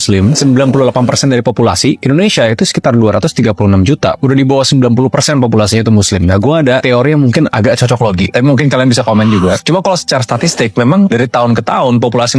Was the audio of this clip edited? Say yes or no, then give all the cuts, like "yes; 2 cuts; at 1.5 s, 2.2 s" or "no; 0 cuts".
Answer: no; 0 cuts